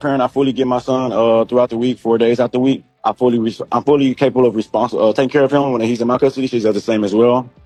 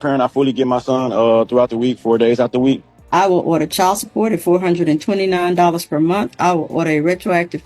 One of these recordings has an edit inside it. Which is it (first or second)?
second